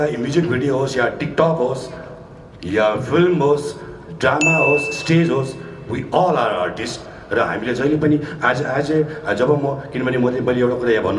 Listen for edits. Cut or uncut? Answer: uncut